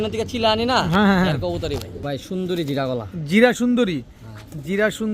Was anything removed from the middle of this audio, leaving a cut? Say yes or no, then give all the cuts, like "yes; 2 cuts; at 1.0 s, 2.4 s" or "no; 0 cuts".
yes; 1 cut; at 1.9 s